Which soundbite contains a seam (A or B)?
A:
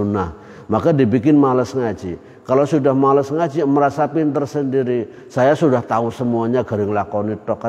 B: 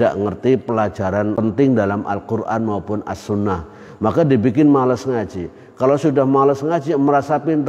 B